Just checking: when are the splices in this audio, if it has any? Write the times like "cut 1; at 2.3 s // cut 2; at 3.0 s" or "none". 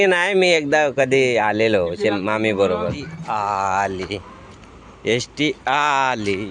cut 1; at 3.1 s